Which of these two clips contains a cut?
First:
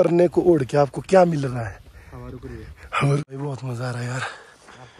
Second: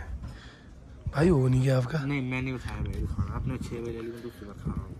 first; 1 cut; at 3.2 s

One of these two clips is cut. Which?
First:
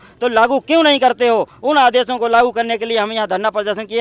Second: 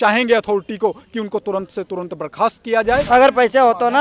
second; 1 cut; at 3.0 s

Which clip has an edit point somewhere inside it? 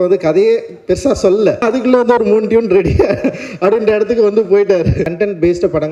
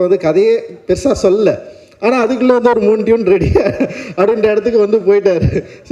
first; 2 cuts; at 1.6 s, 5.1 s

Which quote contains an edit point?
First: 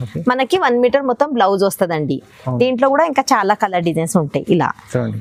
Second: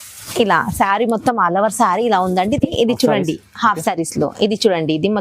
second; 1 cut; at 2.7 s

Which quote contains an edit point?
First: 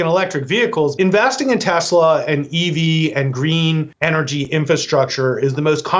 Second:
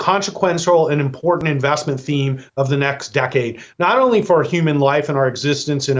first; 2 cuts; at 0.9 s, 3.9 s

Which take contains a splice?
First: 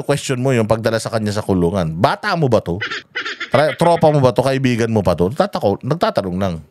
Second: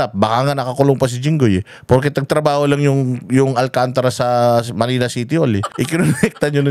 second; 1 cut; at 5.7 s

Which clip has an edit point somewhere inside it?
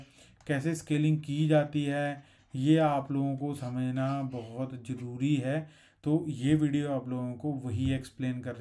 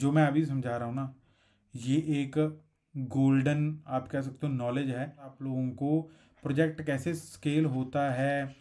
second; 1 cut; at 5.4 s

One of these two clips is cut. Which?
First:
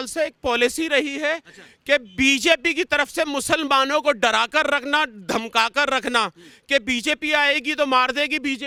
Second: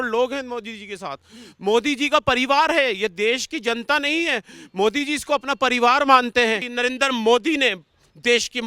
second; 1 cut; at 6.7 s

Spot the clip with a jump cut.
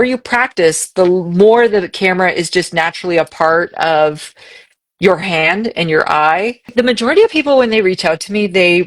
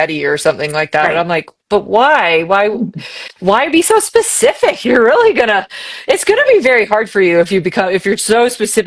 first; 1 cut; at 6.7 s

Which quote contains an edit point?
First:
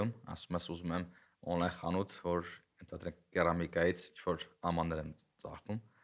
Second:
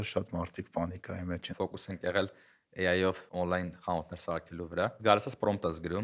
second; 3 cuts; at 1.5 s, 3.3 s, 5.0 s

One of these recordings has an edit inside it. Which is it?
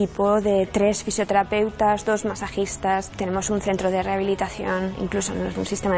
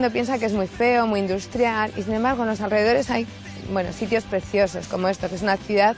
first; 1 cut; at 3.1 s

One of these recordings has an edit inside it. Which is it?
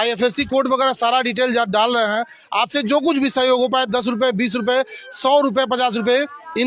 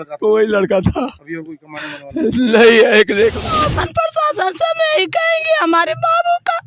second; 1 cut; at 3.5 s

